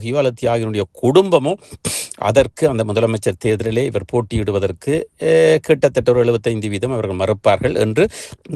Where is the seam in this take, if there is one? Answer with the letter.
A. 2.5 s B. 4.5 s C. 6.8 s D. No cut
D